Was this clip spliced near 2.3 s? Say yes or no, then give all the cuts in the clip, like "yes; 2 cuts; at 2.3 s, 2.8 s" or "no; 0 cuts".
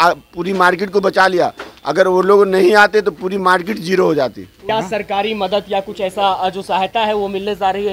no; 1 cut; at 4.6 s